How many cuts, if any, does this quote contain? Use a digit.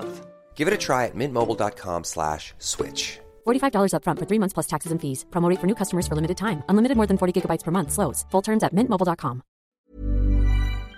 1